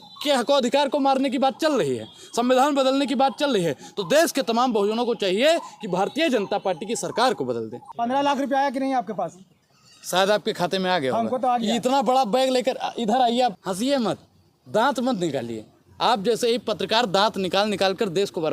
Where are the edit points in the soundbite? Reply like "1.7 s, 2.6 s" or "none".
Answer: 7.8 s, 13.6 s